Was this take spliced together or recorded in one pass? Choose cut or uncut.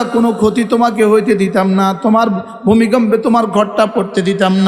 uncut